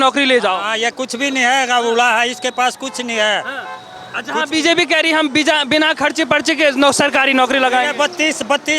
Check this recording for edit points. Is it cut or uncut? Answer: uncut